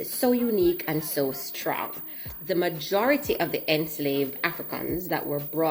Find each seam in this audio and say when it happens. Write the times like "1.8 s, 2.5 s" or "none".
none